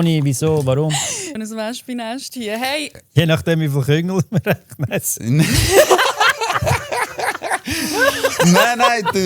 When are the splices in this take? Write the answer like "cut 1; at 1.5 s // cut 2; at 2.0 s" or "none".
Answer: cut 1; at 1.4 s // cut 2; at 2.9 s